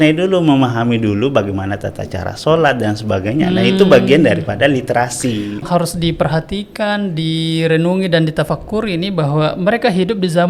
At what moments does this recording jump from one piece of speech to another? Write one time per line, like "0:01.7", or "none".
0:05.7